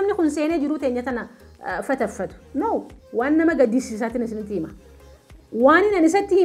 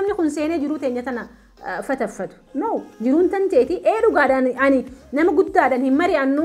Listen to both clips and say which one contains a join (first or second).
first